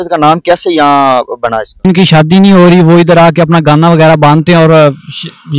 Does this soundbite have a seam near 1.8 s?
yes; 1 cut; at 1.8 s

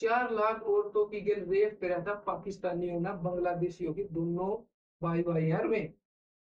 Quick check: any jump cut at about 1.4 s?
no; 0 cuts

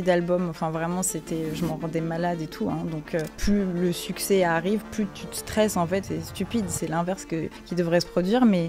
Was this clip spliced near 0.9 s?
no; 3 cuts; at 3.3 s, 6.0 s, 7.6 s

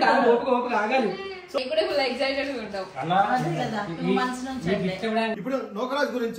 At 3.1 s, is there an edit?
no; 2 cuts; at 1.6 s, 5.3 s

